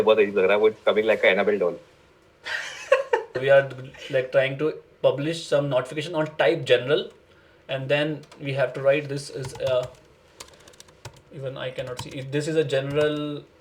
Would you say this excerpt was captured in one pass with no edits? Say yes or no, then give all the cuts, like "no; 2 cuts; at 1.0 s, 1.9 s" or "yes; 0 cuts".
no; 1 cut; at 3.4 s